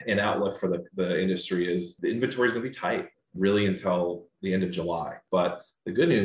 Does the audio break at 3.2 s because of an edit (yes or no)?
yes